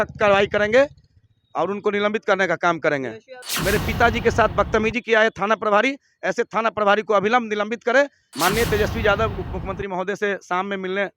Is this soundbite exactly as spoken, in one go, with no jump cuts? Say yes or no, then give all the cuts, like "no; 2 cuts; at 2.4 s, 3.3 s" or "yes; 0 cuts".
no; 2 cuts; at 3.5 s, 8.2 s